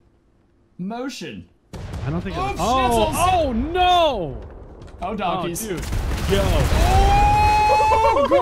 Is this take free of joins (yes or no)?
yes